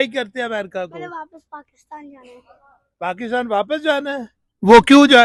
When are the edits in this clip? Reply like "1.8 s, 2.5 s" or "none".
none